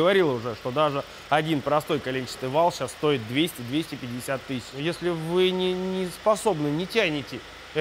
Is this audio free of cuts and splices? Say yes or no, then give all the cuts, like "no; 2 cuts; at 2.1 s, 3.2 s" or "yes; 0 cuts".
no; 1 cut; at 4.8 s